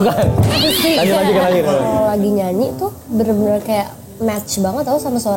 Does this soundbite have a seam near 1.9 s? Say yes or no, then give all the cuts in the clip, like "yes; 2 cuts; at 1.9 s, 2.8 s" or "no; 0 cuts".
yes; 1 cut; at 1.9 s